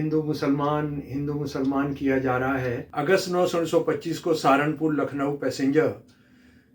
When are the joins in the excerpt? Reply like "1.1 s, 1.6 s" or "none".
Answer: 2.9 s